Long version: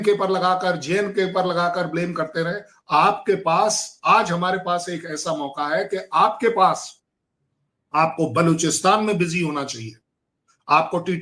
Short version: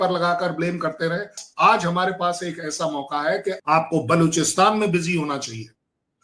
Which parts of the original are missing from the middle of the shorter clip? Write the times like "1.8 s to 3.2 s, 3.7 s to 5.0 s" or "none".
2.8 s to 3.9 s, 6.0 s to 7.9 s